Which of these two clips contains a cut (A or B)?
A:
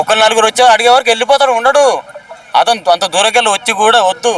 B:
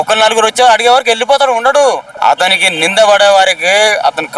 B